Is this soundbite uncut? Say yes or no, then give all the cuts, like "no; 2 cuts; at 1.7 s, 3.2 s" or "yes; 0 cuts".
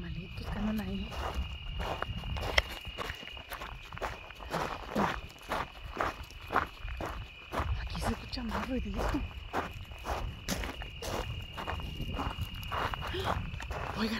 yes; 0 cuts